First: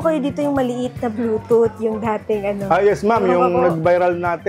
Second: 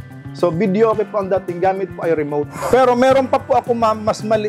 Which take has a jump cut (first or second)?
second